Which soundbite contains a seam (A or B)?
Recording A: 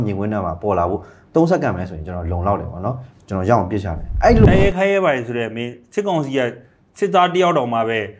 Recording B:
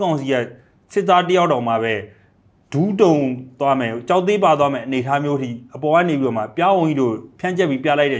A